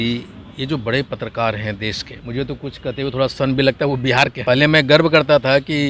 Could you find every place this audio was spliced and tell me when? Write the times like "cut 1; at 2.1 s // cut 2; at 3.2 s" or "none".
cut 1; at 2.1 s // cut 2; at 4.4 s